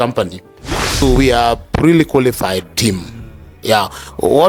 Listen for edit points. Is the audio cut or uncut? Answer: cut